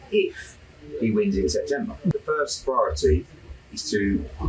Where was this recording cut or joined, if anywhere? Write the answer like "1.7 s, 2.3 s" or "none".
2.1 s